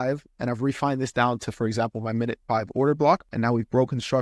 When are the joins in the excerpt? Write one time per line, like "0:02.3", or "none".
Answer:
0:03.3